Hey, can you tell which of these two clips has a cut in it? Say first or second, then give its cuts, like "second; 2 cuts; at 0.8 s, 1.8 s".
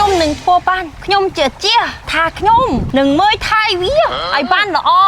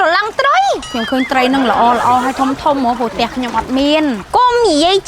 second; 2 cuts; at 0.9 s, 4.2 s